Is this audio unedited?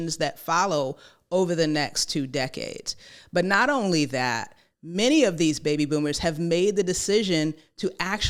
yes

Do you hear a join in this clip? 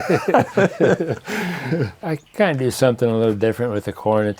yes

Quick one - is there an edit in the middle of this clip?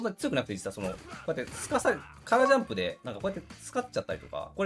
no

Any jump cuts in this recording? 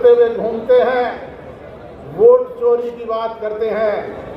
no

